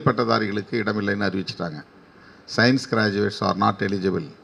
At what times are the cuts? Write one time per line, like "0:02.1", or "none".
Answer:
none